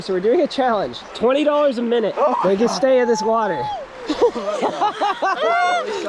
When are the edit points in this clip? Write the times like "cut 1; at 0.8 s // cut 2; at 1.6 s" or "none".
cut 1; at 1.0 s // cut 2; at 2.1 s